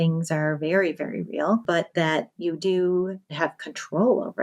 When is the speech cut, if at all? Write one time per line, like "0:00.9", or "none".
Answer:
0:01.6
0:03.3